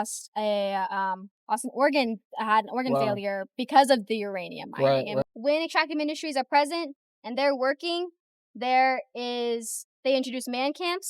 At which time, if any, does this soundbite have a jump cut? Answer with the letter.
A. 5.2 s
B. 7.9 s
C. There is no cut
A